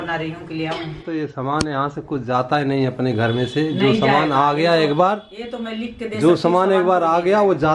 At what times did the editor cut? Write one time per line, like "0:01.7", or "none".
0:00.9